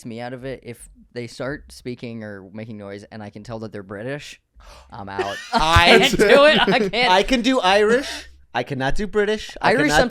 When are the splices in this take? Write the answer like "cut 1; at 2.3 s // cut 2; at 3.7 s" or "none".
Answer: cut 1; at 1.0 s